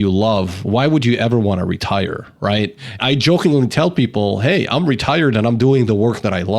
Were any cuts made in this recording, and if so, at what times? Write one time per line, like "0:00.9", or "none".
0:03.0